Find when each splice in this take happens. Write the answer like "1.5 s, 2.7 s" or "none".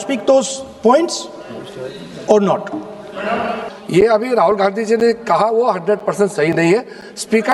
3.7 s